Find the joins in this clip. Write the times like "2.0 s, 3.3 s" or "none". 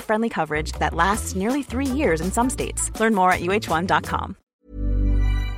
4.4 s